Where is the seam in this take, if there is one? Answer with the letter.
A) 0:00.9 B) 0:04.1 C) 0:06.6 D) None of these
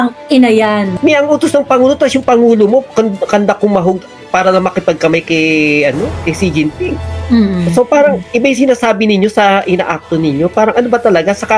A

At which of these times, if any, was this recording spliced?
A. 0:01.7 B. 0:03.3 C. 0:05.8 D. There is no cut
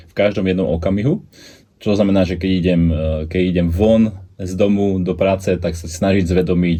D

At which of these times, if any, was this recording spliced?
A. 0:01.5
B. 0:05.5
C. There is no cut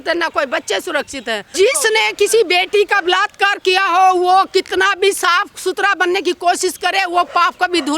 A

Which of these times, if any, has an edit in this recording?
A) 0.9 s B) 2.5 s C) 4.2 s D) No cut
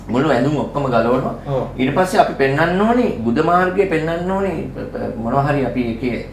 D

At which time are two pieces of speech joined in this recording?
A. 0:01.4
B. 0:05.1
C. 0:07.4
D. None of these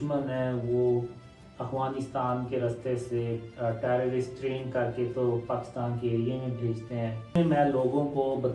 C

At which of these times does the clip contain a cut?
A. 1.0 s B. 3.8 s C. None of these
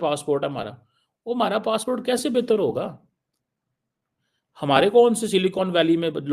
C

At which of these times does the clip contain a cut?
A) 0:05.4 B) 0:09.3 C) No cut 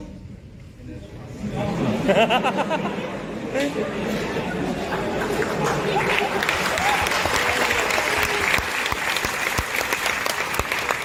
C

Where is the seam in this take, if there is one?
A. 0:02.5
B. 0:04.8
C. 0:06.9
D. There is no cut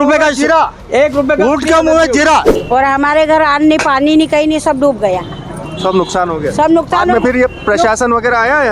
A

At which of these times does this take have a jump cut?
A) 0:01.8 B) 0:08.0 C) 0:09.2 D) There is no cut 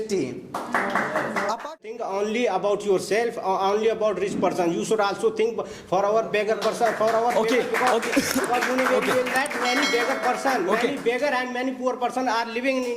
A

